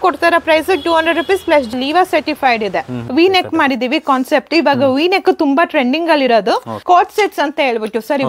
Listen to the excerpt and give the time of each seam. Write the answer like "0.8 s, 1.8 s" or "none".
1.7 s, 3.0 s, 6.7 s